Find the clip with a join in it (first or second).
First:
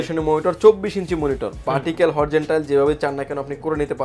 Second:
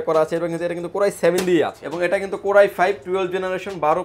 second